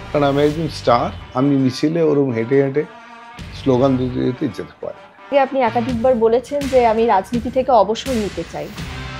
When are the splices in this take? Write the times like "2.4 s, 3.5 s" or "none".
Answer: 5.3 s